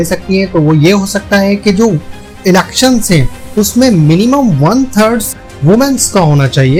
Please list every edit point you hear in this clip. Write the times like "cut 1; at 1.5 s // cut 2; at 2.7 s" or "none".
none